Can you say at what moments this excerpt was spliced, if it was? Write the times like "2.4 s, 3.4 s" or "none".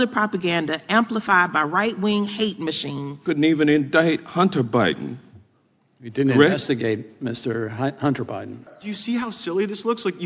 3.1 s, 8.8 s